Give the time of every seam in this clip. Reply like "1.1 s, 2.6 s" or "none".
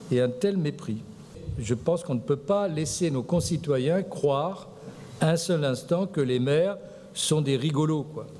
1.3 s